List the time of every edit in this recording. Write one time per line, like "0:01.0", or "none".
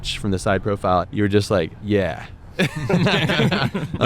0:01.0
0:01.8